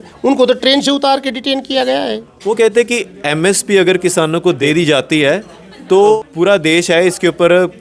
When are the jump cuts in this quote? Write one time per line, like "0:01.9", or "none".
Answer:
0:02.3
0:04.6
0:06.2